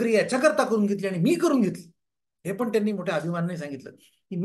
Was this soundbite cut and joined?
no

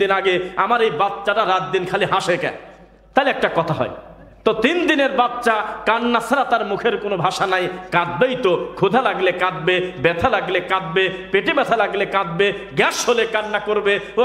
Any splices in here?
no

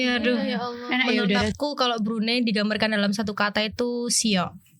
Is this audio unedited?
no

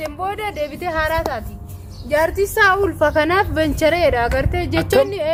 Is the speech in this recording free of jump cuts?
yes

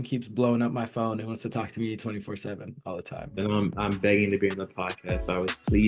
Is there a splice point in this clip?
no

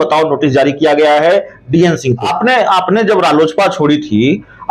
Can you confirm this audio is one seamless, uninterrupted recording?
no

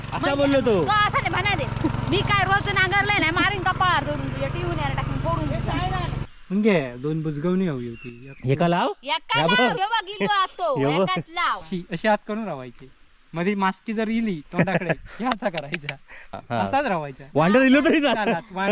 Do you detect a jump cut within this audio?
yes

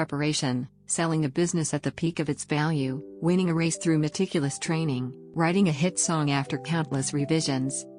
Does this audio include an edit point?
no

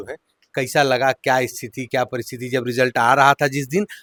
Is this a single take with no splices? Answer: yes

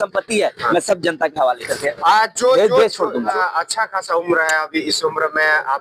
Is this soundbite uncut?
no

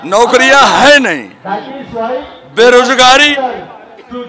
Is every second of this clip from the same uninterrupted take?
yes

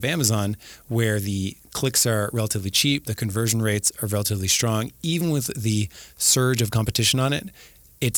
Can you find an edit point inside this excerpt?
no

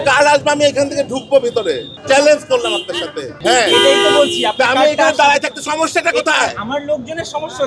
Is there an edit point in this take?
yes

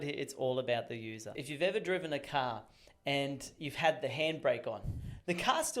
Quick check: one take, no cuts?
no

